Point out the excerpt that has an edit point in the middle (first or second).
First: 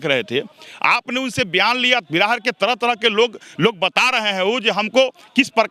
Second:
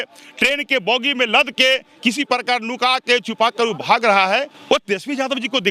second